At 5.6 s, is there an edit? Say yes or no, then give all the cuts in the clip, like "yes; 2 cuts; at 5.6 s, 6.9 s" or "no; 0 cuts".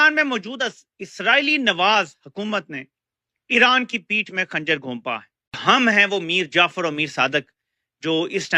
yes; 1 cut; at 5.6 s